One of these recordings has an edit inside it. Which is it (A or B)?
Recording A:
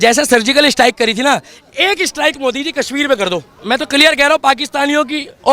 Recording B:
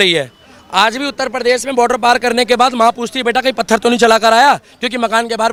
A